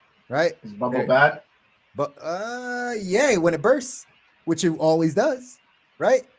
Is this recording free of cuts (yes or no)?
yes